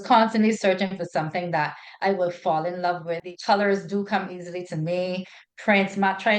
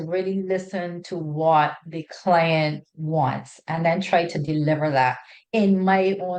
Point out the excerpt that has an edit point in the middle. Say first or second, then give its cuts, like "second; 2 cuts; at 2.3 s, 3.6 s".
first; 1 cut; at 3.3 s